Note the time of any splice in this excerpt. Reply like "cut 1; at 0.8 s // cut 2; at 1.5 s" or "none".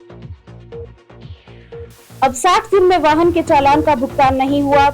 cut 1; at 2.1 s

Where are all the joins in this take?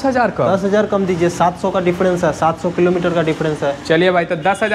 none

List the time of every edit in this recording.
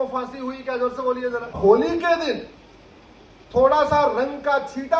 cut 1; at 1.6 s

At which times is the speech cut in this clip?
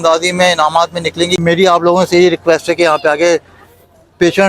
cut 1; at 1.4 s

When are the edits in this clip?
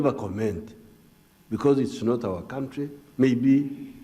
cut 1; at 1.3 s

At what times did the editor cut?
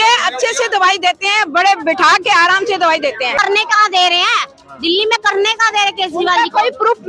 cut 1; at 3.3 s

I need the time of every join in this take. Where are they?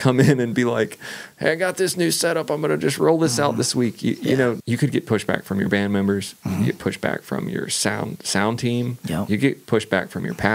cut 1; at 4.6 s

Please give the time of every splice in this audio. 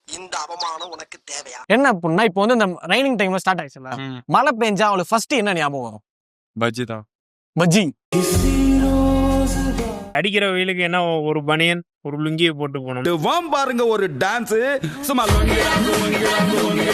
cut 1; at 1.5 s // cut 2; at 10.0 s

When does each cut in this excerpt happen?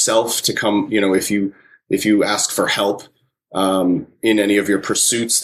none

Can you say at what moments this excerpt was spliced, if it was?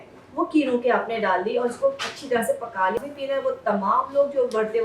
cut 1; at 3.0 s

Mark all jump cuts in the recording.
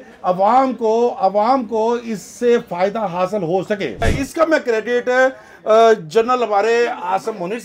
cut 1; at 4.1 s

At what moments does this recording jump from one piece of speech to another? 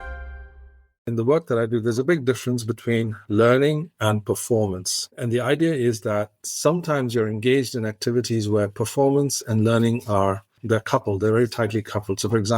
cut 1; at 1.1 s

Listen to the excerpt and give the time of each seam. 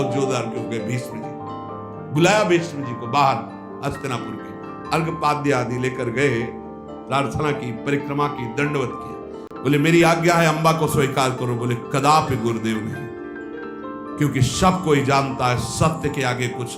none

